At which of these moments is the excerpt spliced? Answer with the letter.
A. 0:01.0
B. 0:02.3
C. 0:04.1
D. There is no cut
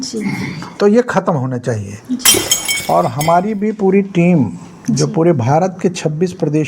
B